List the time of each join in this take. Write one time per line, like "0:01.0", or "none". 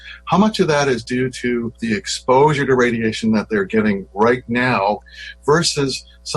0:01.7
0:05.1

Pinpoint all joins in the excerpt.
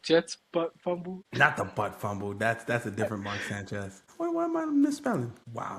none

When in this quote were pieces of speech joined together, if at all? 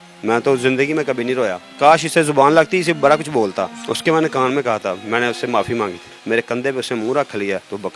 0:01.6
0:03.8
0:06.1

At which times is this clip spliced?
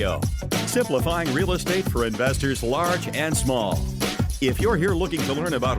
none

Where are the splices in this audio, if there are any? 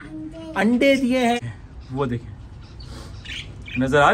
0:01.4

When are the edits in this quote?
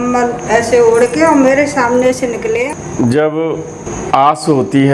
0:02.7
0:03.9

